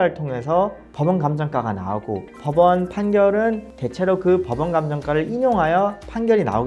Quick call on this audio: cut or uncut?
uncut